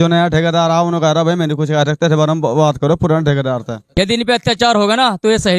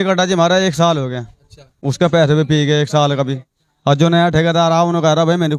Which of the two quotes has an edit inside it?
first; 1 cut; at 3.8 s

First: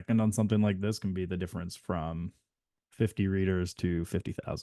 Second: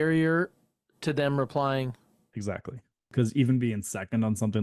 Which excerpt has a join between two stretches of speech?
second; 1 cut; at 3.1 s

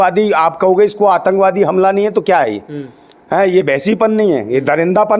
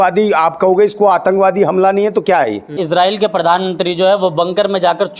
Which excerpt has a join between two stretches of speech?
second; 1 cut; at 2.8 s

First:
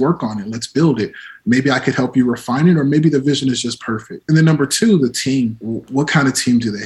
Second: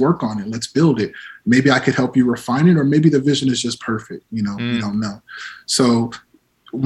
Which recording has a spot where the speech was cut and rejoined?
first; 2 cuts; at 4.1 s, 5.6 s

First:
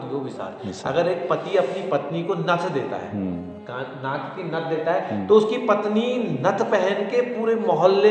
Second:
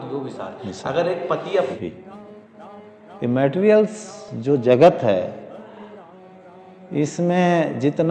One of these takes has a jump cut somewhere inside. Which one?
second; 1 cut; at 1.8 s

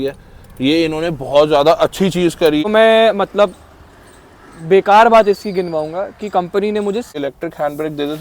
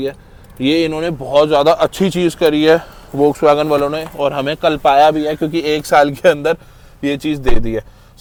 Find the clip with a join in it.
first; 2 cuts; at 2.6 s, 7.1 s

